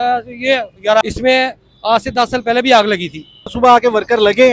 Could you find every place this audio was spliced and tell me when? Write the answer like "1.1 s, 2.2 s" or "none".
1.0 s, 3.5 s